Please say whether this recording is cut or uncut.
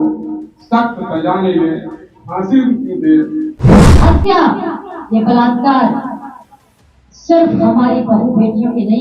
cut